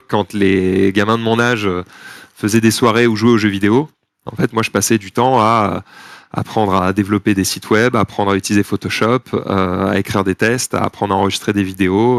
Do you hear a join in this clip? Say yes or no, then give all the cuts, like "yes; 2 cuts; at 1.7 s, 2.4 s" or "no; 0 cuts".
no; 0 cuts